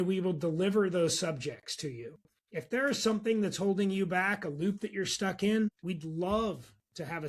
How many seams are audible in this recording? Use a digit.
1